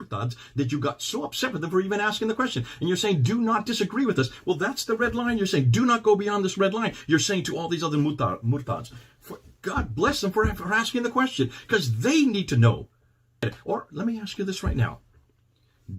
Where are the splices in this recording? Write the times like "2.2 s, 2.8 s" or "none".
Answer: 13.5 s